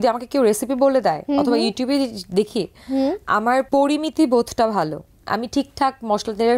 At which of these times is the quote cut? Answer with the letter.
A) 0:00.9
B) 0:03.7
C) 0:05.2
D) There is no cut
B